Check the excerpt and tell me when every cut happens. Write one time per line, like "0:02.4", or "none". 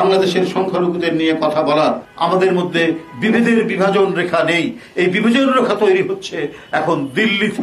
0:02.1